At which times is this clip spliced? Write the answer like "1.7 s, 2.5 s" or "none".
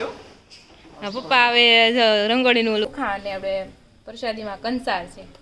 2.9 s

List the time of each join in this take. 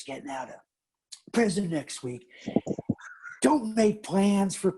none

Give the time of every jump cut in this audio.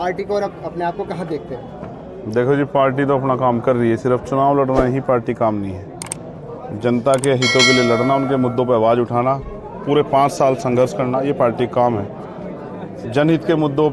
none

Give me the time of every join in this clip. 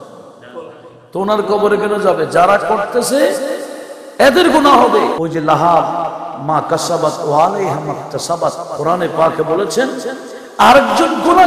5.2 s

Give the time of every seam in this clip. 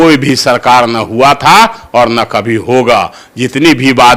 none

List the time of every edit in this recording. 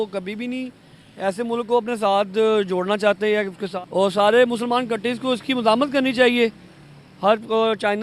3.6 s

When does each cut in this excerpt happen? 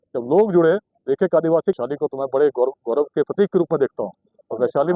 1.8 s

